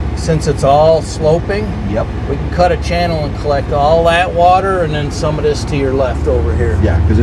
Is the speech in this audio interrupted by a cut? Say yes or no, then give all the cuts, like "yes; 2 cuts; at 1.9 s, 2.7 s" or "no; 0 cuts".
no; 0 cuts